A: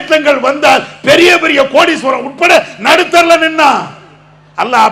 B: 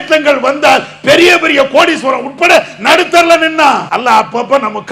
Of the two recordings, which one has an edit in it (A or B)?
B